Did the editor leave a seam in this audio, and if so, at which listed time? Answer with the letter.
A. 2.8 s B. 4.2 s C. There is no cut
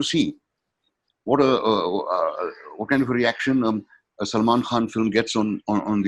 C